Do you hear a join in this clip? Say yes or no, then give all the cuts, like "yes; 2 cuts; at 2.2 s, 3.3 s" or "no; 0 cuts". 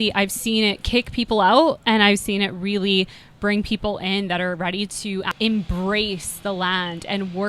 yes; 1 cut; at 5.3 s